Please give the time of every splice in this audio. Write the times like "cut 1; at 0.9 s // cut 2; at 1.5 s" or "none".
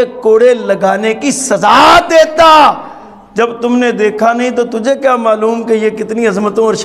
none